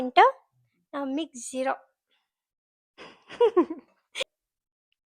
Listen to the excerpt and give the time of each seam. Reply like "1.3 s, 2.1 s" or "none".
4.1 s